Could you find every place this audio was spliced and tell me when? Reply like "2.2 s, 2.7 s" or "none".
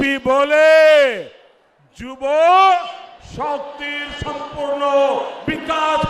none